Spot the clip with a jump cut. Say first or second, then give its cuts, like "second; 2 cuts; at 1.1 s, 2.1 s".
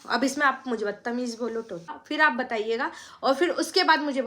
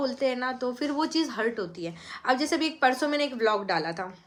first; 1 cut; at 1.9 s